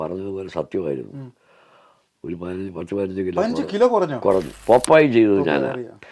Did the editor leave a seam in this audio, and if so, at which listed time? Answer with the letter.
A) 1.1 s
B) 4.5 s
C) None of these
B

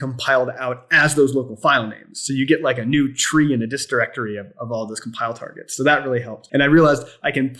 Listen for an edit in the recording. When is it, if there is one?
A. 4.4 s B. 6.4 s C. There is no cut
B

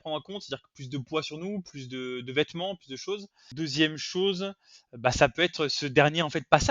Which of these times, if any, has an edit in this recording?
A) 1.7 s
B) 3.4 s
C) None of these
B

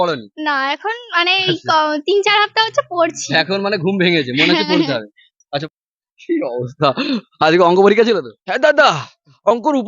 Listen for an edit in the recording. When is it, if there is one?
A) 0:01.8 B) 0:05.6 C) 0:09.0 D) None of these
B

